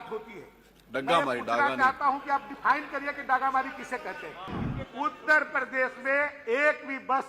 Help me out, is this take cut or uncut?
cut